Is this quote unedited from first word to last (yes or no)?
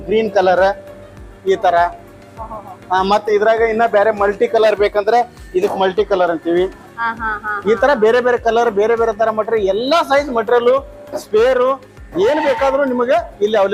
yes